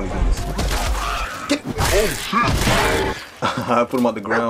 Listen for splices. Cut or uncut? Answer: uncut